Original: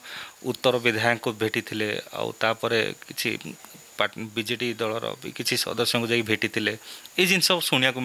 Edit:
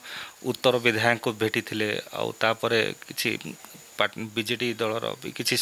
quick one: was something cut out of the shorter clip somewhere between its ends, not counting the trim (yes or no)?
no